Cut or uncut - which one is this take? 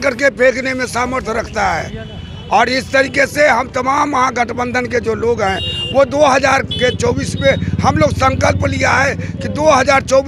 uncut